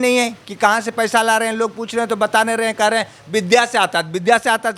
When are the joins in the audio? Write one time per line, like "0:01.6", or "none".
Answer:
none